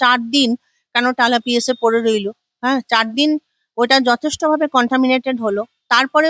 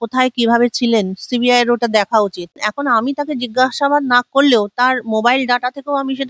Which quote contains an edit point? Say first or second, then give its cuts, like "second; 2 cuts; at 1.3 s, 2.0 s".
second; 1 cut; at 2.6 s